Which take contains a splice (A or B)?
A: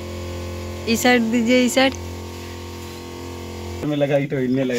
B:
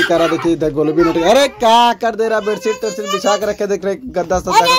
A